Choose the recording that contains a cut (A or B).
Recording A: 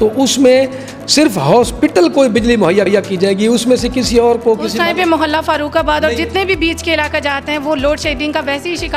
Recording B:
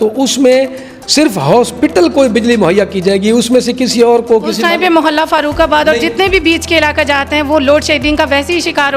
B